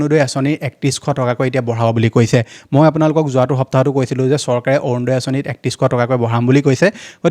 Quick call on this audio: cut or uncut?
uncut